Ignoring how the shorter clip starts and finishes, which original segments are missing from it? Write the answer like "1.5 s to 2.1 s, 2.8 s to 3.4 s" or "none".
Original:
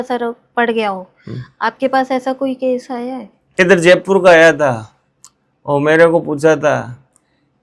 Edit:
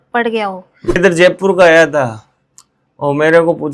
1.4 s to 3.6 s